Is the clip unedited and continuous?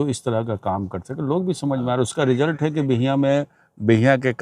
yes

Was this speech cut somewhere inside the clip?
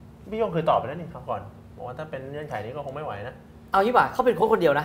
no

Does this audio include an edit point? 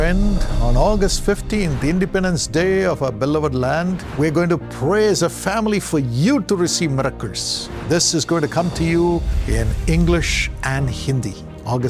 no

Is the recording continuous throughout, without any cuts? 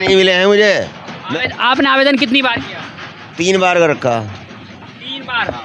yes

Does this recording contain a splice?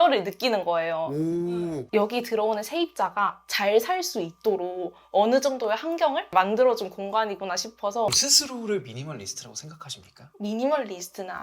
yes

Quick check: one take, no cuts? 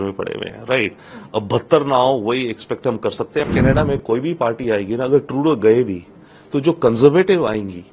no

